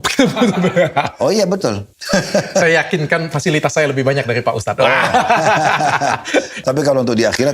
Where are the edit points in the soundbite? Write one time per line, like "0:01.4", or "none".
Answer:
0:01.9
0:06.6